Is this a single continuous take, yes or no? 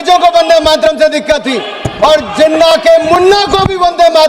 yes